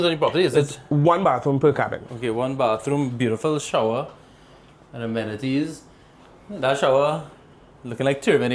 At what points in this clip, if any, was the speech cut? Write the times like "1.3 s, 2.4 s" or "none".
none